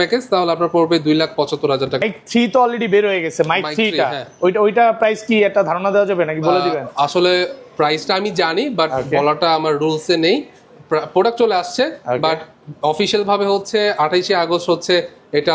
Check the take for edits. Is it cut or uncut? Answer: cut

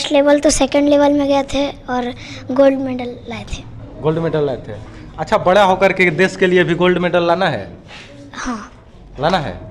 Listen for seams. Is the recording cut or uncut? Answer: uncut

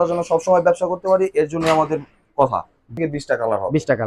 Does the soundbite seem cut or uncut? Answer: cut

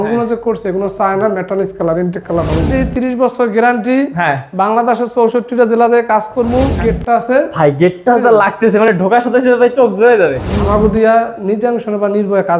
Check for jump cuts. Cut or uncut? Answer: cut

